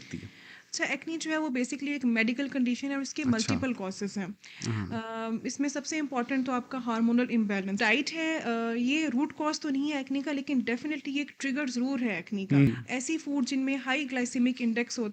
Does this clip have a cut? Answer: yes; 2 cuts; at 7.8 s, 12.7 s

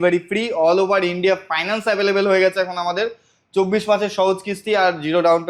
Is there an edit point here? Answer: no; 0 cuts

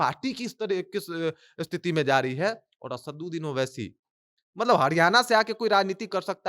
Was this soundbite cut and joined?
no; 0 cuts

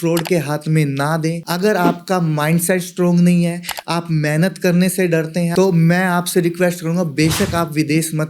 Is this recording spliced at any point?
yes; 2 cuts; at 1.4 s, 5.5 s

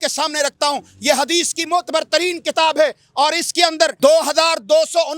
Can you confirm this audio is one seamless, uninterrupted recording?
no; 1 cut; at 3.9 s

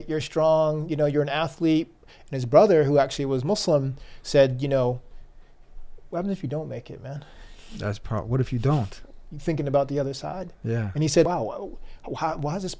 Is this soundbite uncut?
no; 1 cut; at 11.3 s

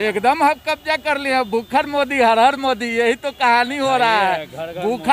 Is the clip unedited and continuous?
yes; 0 cuts

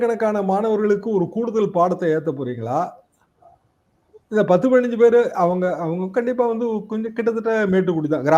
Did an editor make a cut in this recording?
no; 0 cuts

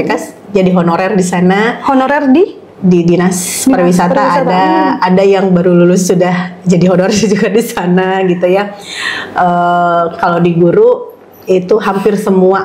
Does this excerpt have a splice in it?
no; 0 cuts

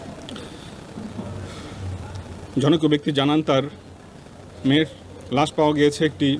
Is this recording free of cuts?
yes; 0 cuts

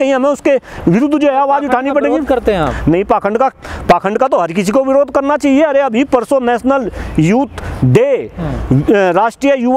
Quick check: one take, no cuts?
yes; 0 cuts

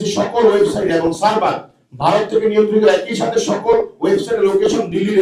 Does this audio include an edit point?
no; 0 cuts

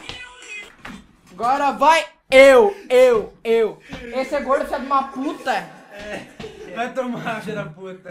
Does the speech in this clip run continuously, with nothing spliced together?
no; 1 cut; at 6.6 s

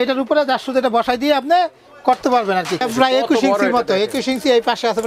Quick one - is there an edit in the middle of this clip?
yes; 1 cut; at 2.8 s

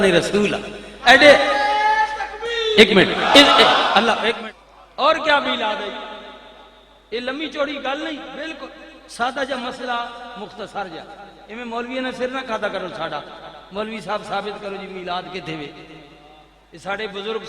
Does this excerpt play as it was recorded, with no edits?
no; 1 cut; at 4.3 s

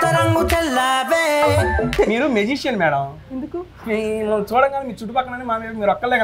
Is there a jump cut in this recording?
yes; 1 cut; at 1.9 s

